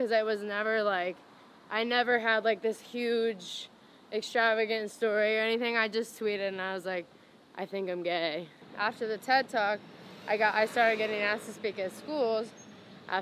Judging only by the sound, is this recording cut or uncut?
cut